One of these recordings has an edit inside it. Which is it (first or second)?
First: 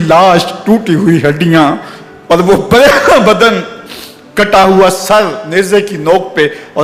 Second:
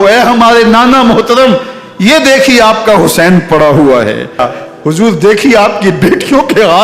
second